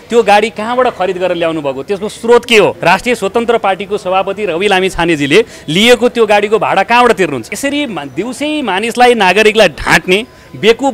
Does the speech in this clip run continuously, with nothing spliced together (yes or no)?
no